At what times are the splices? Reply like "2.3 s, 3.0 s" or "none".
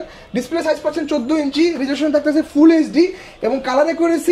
none